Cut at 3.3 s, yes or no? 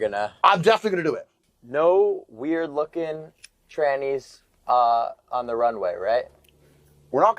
no